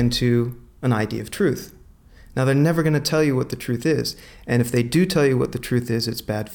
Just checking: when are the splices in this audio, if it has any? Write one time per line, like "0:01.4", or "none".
none